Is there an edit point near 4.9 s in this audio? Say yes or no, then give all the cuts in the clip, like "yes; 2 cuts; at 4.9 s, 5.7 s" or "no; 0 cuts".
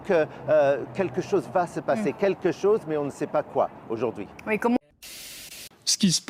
yes; 1 cut; at 4.9 s